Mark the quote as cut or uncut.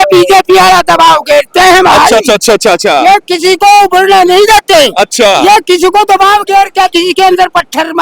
uncut